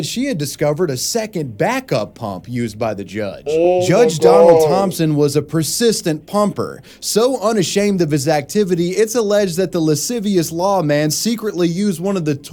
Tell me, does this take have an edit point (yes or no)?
no